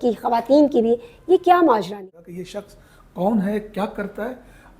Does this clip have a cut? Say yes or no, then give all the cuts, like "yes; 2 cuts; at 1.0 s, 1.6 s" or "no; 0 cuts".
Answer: yes; 1 cut; at 2.0 s